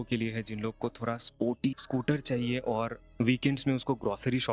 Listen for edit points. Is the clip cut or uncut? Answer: cut